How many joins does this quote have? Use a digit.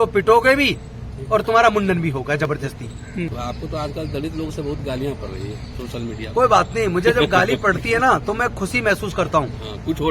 1